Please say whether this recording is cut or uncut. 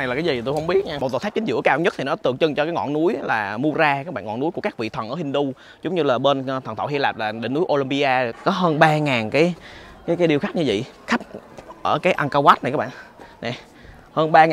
cut